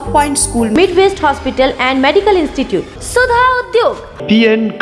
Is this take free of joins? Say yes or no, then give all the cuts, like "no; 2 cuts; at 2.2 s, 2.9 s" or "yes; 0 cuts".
yes; 0 cuts